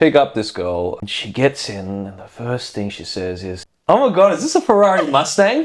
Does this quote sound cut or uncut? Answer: cut